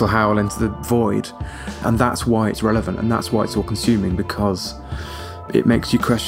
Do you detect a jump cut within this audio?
yes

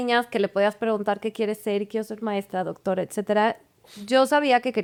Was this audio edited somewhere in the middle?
no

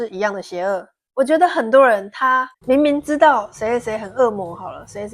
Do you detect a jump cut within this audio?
yes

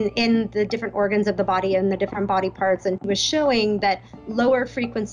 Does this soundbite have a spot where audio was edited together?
yes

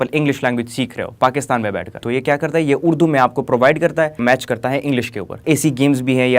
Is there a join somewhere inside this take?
yes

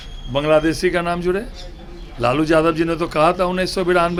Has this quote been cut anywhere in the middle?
no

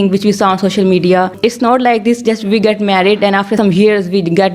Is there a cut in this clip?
yes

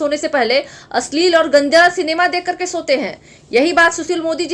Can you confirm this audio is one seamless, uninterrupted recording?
yes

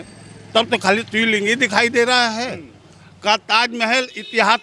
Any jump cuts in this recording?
no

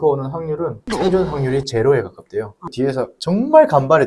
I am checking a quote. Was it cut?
yes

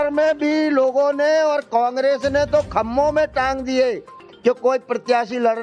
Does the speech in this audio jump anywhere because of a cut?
no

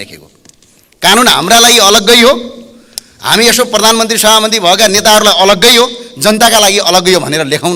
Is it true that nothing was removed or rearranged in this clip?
yes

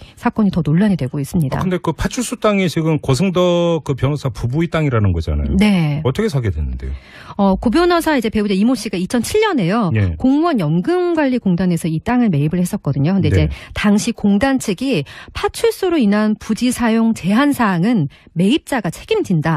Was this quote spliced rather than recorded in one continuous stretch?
no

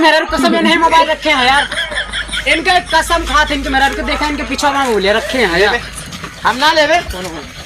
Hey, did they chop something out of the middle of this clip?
no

